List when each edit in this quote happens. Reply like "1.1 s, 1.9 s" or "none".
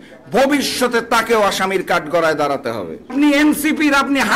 3.1 s